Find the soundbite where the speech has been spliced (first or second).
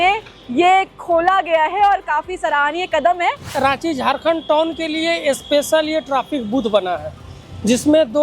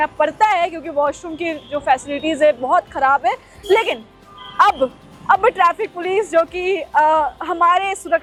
first